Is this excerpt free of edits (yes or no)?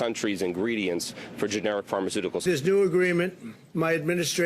no